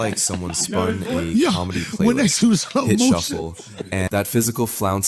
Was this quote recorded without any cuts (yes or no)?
no